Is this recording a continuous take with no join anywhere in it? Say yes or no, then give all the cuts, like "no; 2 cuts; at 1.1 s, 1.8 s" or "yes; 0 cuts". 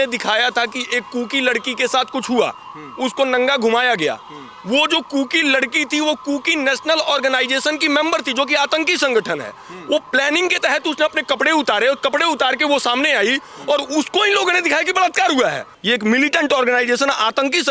no; 1 cut; at 15.7 s